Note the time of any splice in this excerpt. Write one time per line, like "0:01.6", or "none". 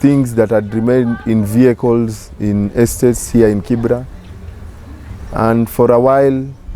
none